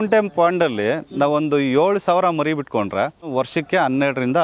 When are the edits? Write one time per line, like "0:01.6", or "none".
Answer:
0:03.3